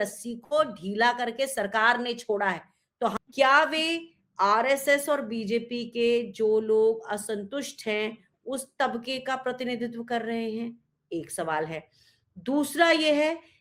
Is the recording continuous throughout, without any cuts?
no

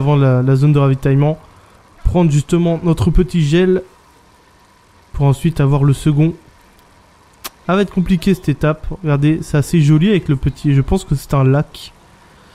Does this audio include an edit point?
no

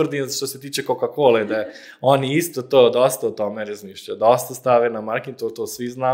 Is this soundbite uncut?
yes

